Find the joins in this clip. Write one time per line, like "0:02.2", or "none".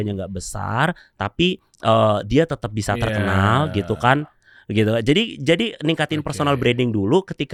none